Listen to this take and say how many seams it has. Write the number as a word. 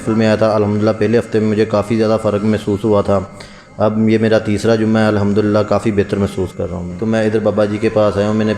one